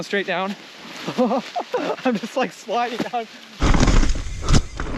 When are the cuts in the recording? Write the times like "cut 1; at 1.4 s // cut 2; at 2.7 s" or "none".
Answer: cut 1; at 3.6 s